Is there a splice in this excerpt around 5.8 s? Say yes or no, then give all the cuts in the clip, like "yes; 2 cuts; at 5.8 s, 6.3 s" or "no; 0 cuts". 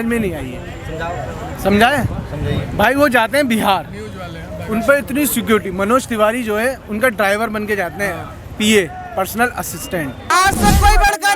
no; 1 cut; at 10.3 s